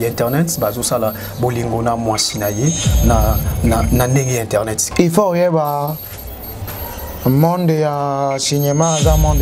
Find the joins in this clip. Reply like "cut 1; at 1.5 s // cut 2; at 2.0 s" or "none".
cut 1; at 4.8 s